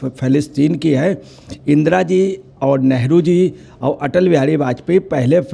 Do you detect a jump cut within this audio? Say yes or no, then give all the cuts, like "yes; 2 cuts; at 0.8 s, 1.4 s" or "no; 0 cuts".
no; 0 cuts